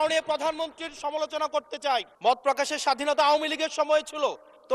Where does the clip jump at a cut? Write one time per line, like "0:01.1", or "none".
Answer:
0:02.1